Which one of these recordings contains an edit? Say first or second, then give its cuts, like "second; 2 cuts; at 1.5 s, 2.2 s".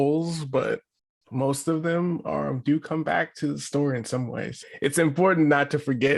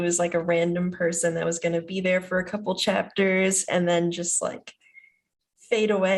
first; 1 cut; at 4.5 s